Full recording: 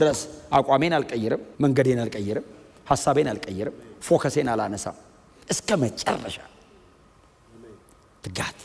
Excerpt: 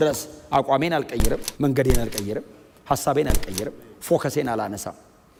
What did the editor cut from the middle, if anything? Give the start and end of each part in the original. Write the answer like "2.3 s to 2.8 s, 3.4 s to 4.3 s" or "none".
none